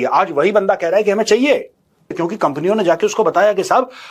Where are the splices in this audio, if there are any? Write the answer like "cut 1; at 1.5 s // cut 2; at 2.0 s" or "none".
cut 1; at 2.2 s